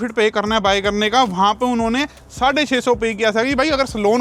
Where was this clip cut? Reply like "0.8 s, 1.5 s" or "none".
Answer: none